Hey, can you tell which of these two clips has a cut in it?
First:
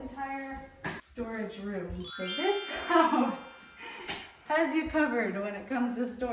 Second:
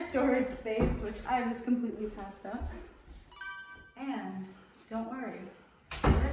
first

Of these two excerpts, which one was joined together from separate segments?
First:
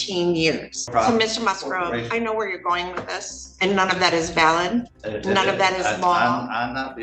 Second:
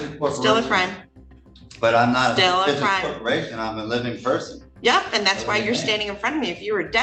first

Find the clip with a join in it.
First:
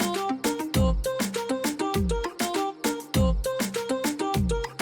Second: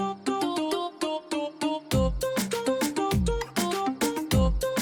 first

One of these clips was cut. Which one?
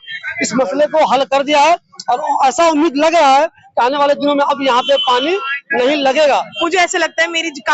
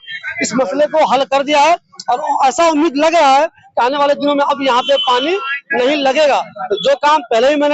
first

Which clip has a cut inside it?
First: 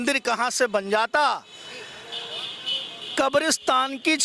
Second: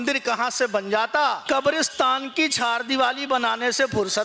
second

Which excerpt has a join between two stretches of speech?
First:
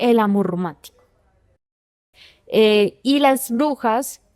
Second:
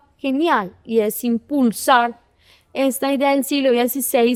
first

